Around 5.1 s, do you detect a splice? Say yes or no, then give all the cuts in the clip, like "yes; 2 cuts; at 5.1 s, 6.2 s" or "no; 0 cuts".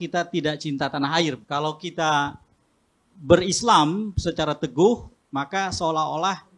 no; 1 cut; at 1.4 s